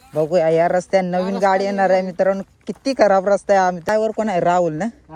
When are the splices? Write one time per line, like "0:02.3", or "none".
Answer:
none